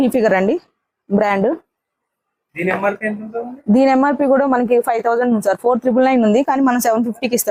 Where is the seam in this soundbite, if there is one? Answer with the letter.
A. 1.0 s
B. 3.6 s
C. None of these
C